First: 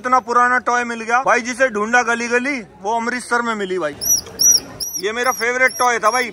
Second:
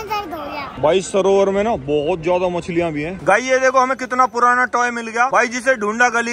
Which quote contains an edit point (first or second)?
second